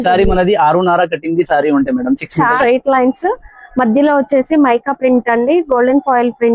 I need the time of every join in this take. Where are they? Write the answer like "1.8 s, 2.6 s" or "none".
2.5 s